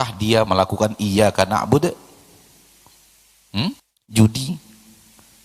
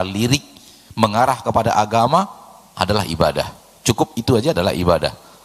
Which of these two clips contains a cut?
first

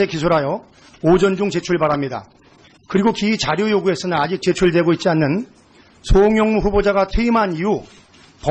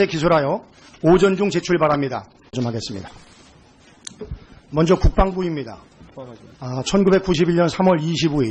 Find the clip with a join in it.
first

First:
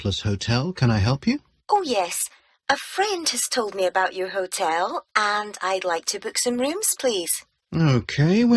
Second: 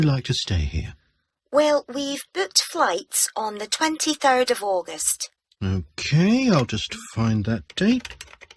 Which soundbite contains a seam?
first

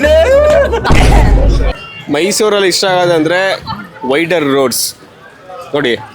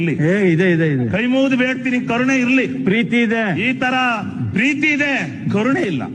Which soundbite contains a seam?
first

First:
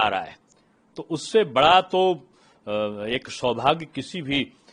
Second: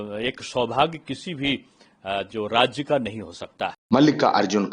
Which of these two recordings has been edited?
second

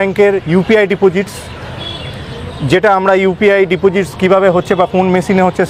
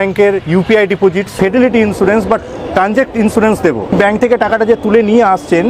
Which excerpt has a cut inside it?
second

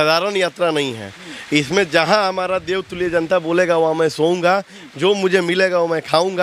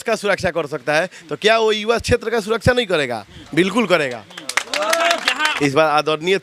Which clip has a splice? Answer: second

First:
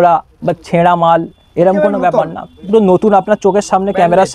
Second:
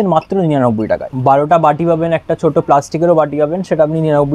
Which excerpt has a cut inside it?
second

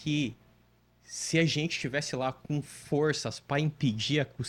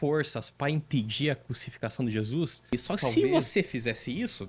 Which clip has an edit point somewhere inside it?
second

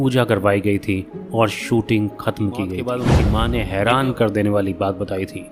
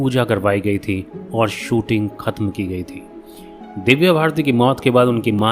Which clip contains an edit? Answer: first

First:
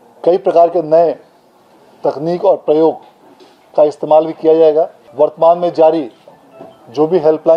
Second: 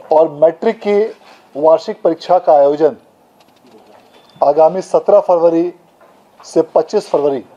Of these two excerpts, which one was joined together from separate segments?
first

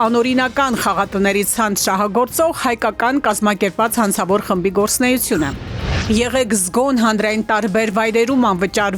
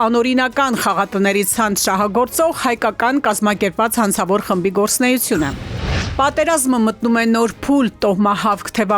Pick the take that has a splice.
second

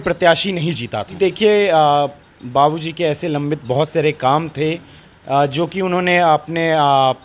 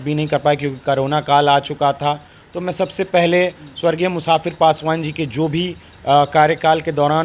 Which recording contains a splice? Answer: first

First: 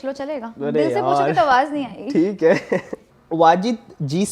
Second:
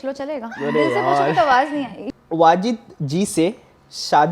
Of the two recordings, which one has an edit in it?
second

